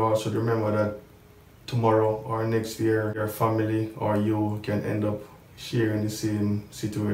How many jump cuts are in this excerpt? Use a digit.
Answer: 1